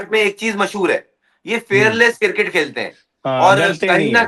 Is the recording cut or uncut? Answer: uncut